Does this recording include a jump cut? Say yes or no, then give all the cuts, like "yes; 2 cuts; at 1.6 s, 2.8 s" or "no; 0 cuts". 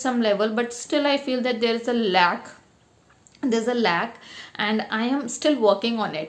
no; 0 cuts